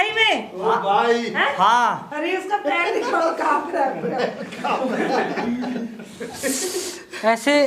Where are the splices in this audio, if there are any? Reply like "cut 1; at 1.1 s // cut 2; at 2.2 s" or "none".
cut 1; at 2.1 s